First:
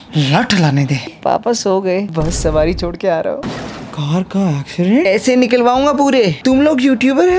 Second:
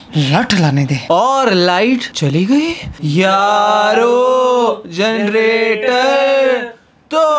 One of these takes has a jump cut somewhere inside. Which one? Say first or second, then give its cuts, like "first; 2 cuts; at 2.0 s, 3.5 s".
first; 3 cuts; at 1.1 s, 3.4 s, 5.1 s